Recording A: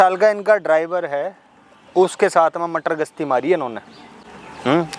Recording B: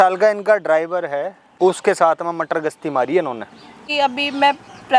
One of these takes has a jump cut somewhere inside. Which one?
B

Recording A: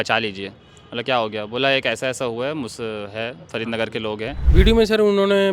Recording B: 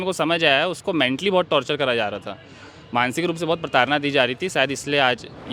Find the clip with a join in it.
A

